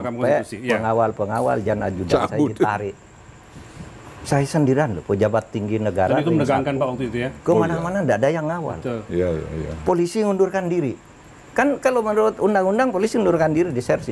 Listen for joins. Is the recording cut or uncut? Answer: uncut